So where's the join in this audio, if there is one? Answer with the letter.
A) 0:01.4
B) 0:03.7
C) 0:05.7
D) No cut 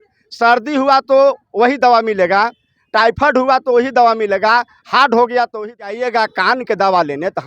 C